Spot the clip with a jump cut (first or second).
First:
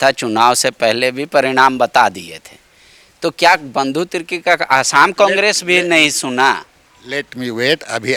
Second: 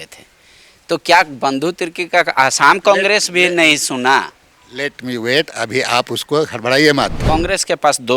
second